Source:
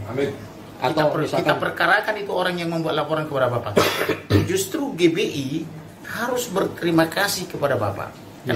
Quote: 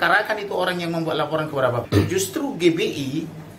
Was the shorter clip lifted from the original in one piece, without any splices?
no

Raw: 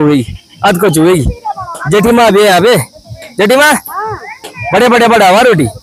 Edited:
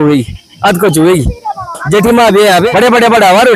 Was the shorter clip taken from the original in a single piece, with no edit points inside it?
no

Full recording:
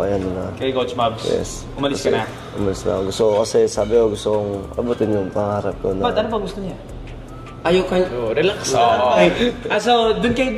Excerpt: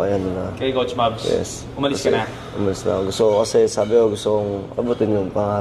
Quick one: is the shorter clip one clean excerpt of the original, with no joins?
yes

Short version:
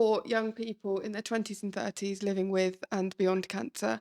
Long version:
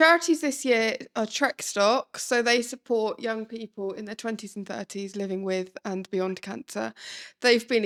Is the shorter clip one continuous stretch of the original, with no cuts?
yes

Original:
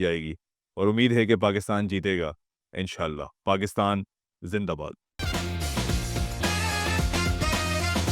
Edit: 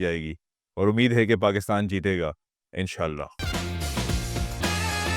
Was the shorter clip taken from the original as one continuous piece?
no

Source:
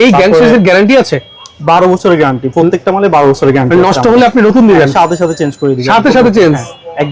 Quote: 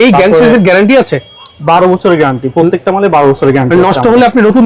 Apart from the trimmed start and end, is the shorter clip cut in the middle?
no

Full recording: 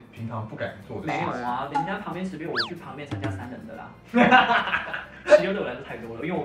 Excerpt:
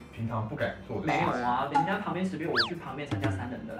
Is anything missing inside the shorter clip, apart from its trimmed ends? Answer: no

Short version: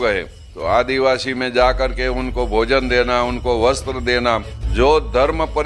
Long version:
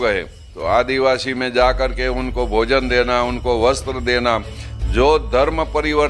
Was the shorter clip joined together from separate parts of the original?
yes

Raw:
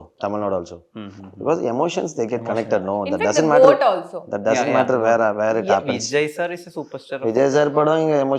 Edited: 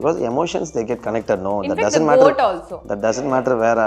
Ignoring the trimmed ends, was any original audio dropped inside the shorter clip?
no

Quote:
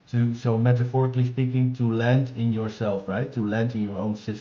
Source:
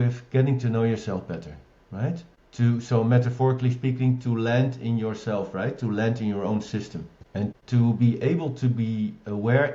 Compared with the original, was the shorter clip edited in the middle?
no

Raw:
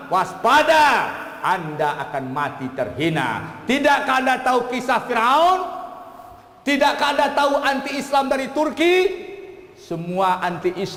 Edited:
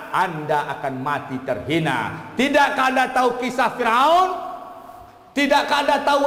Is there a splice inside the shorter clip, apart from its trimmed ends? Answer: no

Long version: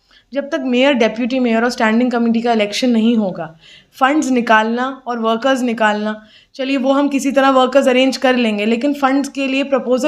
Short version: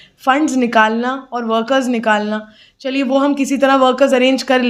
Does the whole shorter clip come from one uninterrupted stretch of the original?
yes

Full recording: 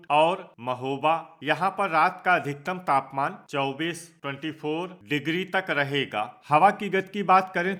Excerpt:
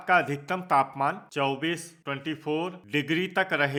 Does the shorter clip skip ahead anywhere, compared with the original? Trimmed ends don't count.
no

